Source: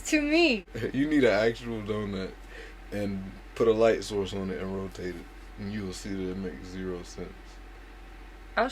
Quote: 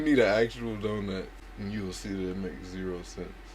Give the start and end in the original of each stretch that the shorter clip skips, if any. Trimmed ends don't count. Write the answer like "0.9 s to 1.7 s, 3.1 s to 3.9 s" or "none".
2.5 s to 5.4 s